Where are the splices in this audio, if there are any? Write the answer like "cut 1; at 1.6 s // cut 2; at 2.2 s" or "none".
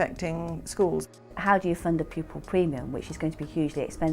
cut 1; at 1.3 s